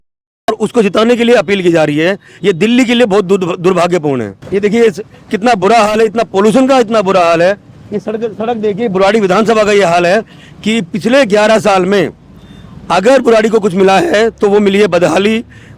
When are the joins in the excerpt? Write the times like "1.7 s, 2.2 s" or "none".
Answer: 4.3 s